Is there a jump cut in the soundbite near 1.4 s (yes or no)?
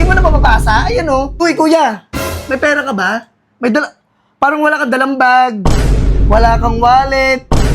yes